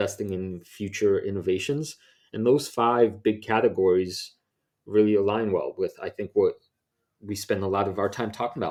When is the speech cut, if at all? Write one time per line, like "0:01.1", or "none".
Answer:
none